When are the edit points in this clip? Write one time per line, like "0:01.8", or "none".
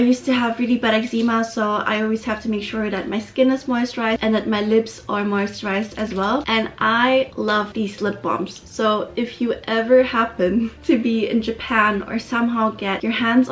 none